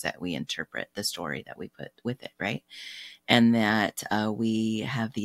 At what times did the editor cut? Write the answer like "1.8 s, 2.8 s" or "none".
none